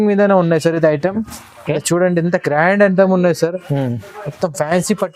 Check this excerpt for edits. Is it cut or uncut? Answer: uncut